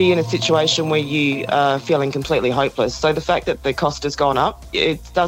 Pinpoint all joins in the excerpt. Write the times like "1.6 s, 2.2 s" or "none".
none